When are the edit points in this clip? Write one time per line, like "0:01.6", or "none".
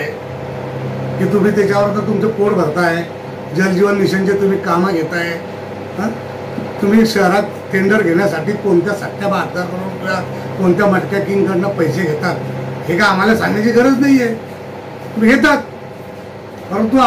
none